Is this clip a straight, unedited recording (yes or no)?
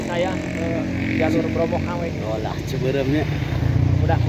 yes